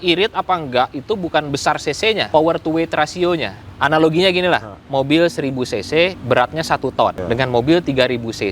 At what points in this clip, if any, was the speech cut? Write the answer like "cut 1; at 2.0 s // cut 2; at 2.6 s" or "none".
cut 1; at 2.2 s // cut 2; at 3.6 s // cut 3; at 4.8 s // cut 4; at 6.2 s // cut 5; at 7.2 s